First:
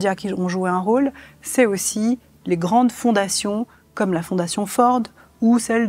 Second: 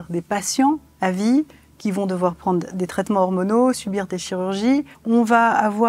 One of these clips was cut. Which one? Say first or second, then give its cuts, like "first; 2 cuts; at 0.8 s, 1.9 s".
second; 1 cut; at 4.9 s